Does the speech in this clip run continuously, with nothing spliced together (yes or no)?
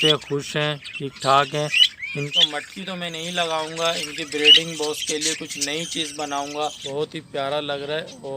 no